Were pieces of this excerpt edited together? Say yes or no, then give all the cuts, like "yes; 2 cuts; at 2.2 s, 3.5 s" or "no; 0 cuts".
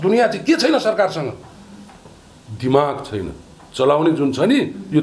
no; 0 cuts